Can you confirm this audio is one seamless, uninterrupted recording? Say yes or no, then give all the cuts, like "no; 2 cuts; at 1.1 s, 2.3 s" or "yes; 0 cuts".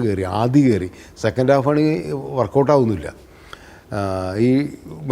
yes; 0 cuts